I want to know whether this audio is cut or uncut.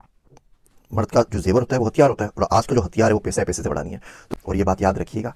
cut